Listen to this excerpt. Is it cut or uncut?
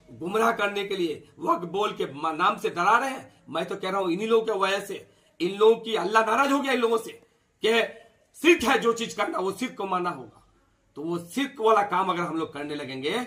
uncut